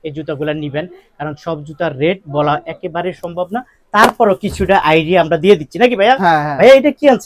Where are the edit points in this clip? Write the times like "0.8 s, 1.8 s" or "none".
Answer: none